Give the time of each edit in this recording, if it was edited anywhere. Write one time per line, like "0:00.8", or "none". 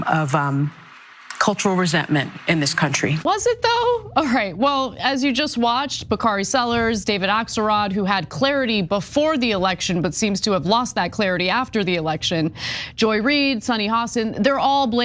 0:03.2